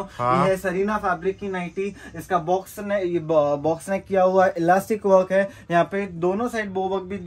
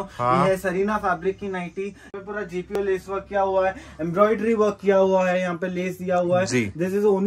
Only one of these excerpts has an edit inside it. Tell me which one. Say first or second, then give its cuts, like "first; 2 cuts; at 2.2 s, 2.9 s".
second; 1 cut; at 2.3 s